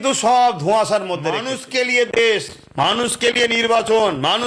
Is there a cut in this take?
yes; 1 cut; at 1.5 s

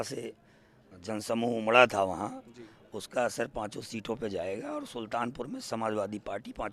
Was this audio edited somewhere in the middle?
no; 0 cuts

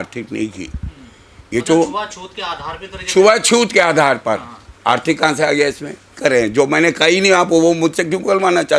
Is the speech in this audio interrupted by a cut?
no; 0 cuts

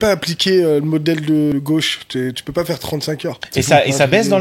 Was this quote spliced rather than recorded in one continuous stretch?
yes; 2 cuts; at 1.5 s, 3.4 s

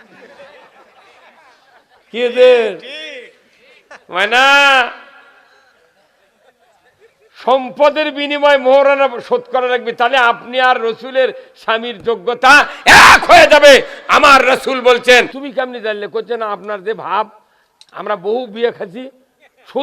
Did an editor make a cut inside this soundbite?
yes; 1 cut; at 15.4 s

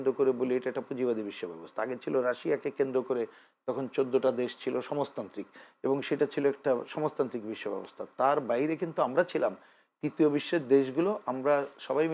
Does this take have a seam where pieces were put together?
no; 0 cuts

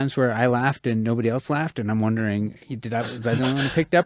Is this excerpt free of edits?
yes; 0 cuts

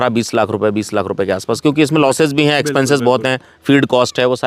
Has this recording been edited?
no; 0 cuts

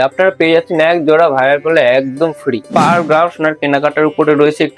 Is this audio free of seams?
no; 1 cut; at 2.7 s

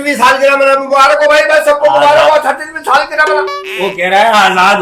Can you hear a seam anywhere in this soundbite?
no; 0 cuts

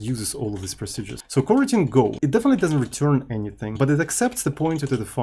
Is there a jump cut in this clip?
yes; 3 cuts; at 1.2 s, 2.1 s, 3.6 s

